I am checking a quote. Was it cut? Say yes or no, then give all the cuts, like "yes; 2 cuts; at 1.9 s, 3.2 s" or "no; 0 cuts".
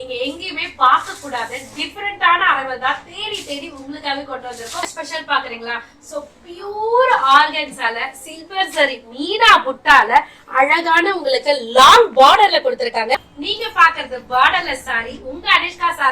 yes; 2 cuts; at 4.8 s, 13.3 s